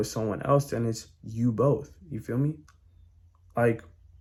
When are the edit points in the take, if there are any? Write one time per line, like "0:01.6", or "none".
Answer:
none

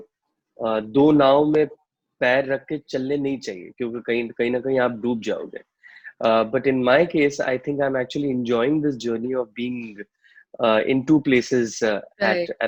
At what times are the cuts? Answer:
none

